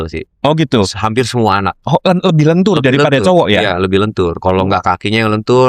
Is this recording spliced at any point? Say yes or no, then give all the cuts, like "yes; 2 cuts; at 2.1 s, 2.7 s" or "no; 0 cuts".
no; 0 cuts